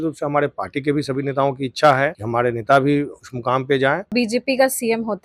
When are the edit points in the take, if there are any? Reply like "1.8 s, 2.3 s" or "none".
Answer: 2.2 s, 4.1 s